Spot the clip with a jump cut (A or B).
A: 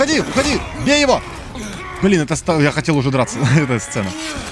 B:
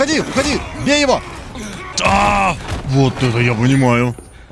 B